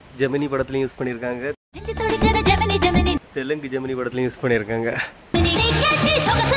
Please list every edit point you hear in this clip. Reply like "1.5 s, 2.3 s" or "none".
3.2 s